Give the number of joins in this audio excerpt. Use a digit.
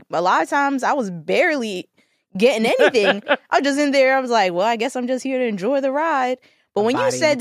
0